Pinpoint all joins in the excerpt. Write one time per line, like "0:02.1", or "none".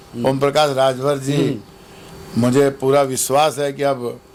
none